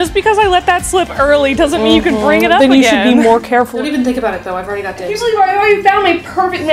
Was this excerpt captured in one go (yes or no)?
no